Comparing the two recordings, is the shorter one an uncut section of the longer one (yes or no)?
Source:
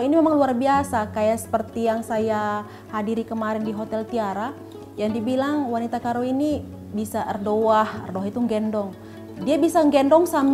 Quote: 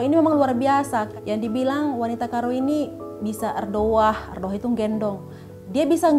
no